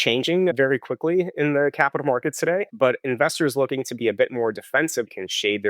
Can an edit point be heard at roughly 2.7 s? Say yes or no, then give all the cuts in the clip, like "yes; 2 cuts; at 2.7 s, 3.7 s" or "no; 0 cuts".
yes; 1 cut; at 2.7 s